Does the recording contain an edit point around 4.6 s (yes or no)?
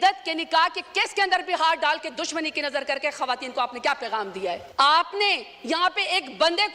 yes